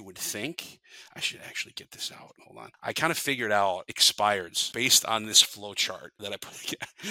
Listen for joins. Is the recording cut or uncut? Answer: cut